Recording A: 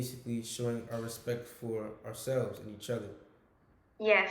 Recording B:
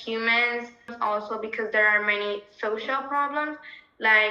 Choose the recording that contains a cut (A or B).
B